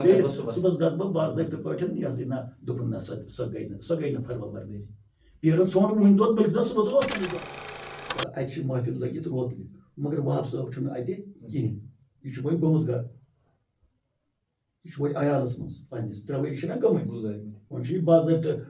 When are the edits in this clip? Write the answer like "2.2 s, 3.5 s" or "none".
7.6 s